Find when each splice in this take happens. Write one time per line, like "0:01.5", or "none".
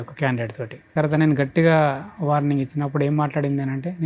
0:00.9